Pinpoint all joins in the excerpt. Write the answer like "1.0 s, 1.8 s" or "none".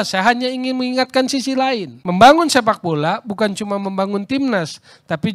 1.9 s